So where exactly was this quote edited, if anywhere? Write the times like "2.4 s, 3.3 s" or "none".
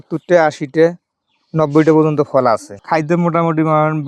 2.7 s